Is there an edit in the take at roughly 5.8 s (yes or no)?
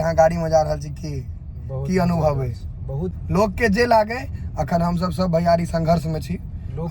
no